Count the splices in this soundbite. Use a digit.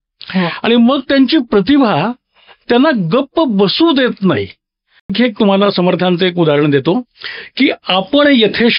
1